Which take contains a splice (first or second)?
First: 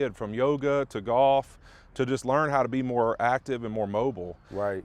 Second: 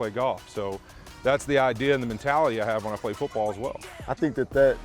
second